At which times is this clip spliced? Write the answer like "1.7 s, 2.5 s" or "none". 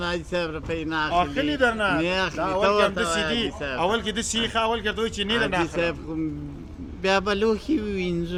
none